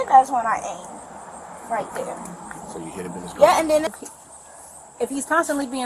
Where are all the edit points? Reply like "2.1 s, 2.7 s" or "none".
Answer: 3.9 s